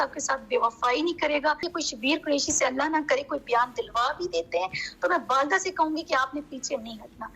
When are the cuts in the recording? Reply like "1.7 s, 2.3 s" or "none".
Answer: 1.7 s